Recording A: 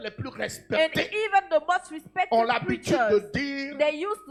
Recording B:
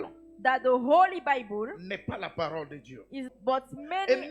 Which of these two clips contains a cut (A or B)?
B